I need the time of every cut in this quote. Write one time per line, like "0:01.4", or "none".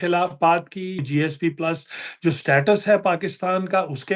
0:01.0